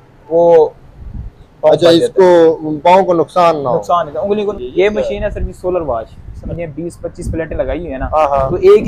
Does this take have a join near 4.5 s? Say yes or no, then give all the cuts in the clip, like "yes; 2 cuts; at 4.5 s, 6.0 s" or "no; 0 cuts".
yes; 2 cuts; at 4.5 s, 6.2 s